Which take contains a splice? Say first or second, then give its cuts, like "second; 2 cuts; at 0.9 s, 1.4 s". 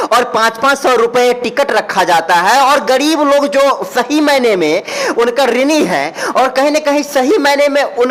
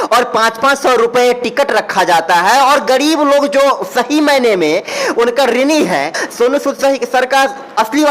second; 1 cut; at 6.2 s